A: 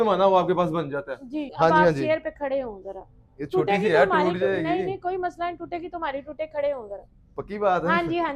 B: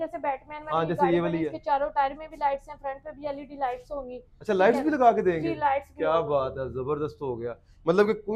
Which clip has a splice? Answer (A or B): A